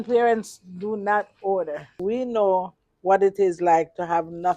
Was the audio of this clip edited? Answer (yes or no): yes